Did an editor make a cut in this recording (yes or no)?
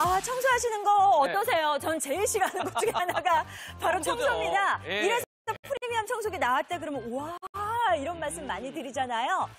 no